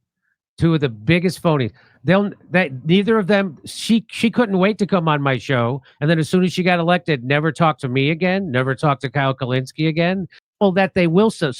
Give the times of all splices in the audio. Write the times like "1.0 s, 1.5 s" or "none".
10.4 s